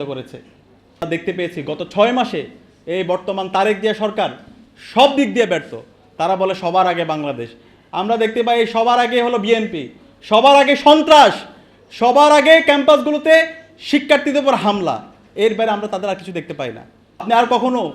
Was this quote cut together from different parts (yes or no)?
yes